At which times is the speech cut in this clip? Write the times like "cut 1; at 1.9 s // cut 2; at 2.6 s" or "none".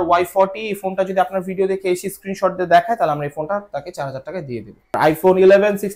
cut 1; at 4.9 s